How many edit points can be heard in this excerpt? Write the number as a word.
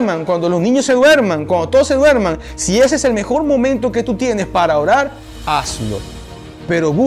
zero